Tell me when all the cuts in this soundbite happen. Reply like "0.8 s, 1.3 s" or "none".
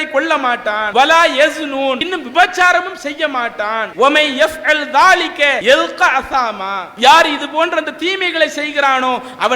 0.8 s, 2.1 s, 3.9 s, 5.6 s

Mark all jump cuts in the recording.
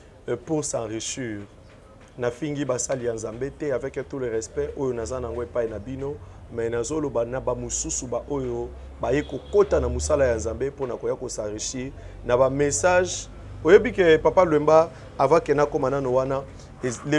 none

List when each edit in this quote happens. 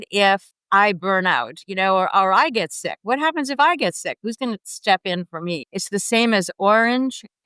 5.7 s

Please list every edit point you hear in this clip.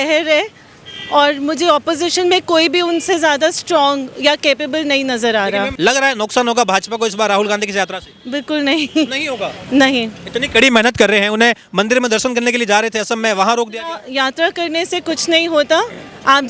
5.7 s

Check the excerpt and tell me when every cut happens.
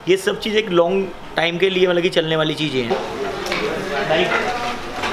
2.9 s

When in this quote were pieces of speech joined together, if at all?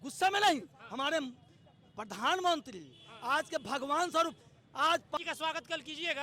5.2 s

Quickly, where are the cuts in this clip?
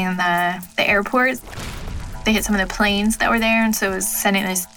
none

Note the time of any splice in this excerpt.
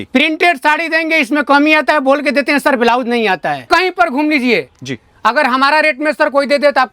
3.7 s

